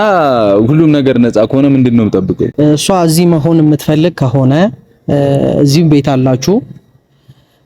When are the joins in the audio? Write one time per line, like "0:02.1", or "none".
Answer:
0:02.5